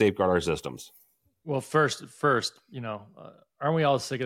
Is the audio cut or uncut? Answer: uncut